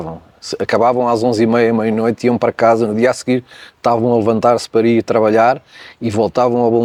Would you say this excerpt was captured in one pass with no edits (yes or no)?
yes